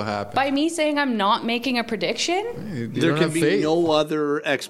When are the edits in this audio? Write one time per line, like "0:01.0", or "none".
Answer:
0:02.6